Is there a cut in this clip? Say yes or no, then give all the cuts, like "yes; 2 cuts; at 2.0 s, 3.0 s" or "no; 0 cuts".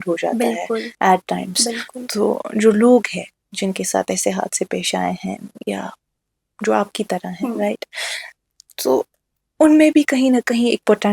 no; 0 cuts